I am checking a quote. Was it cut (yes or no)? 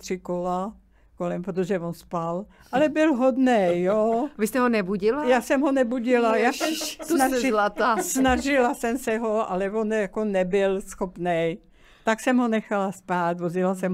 no